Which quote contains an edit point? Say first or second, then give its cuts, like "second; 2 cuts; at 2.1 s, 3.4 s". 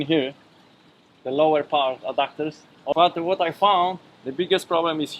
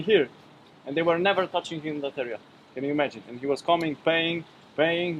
first; 1 cut; at 2.9 s